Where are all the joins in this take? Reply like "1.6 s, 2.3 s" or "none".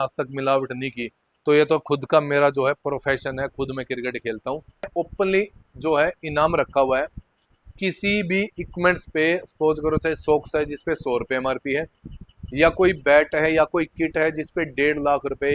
4.9 s